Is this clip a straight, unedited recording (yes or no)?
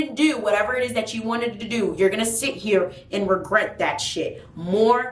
yes